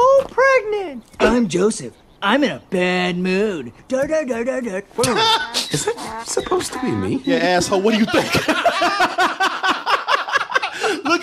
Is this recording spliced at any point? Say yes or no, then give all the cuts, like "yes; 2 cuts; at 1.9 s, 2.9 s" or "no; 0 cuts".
no; 0 cuts